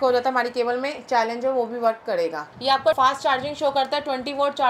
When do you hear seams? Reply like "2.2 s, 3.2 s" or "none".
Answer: 2.5 s